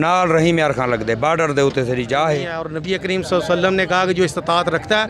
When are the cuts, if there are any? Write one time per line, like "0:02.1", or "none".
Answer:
0:02.7